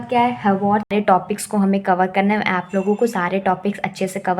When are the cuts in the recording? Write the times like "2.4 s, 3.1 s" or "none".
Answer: 0.9 s